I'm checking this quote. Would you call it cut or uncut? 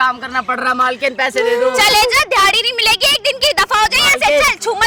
uncut